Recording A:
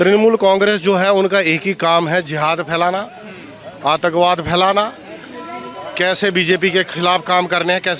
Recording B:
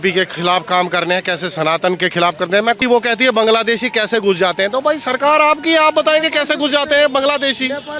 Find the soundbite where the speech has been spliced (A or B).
B